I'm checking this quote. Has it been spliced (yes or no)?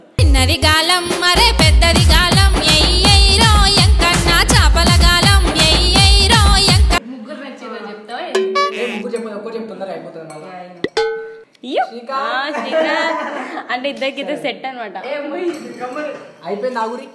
no